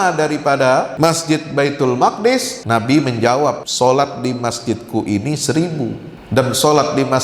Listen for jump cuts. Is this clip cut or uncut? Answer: cut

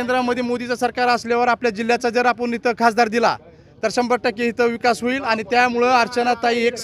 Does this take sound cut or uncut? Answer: uncut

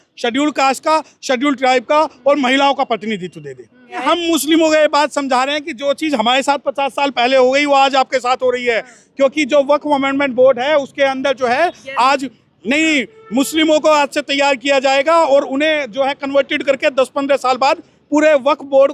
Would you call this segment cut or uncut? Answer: cut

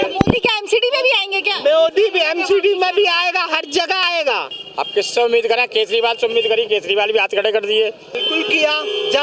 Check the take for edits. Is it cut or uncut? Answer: cut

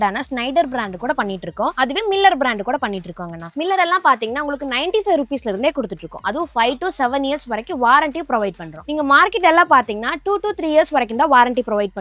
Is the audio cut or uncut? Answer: uncut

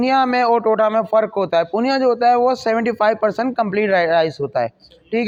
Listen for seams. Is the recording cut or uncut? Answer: uncut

